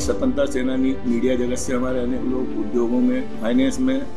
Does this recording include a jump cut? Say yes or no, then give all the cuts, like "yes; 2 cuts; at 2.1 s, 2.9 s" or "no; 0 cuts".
yes; 2 cuts; at 1.0 s, 3.4 s